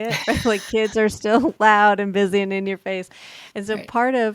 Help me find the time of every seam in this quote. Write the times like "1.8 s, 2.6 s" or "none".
none